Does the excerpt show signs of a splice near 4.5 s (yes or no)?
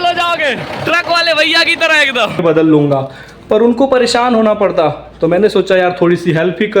no